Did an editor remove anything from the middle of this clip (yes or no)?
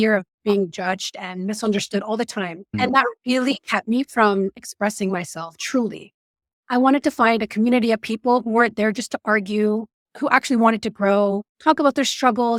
no